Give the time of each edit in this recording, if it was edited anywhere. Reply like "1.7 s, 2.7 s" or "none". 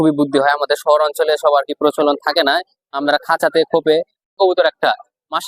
4.3 s